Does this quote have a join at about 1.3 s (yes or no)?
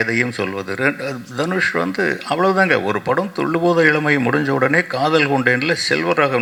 no